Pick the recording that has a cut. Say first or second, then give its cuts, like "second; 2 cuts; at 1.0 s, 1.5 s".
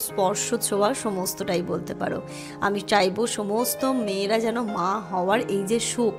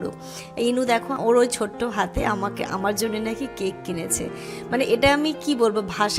second; 1 cut; at 1.1 s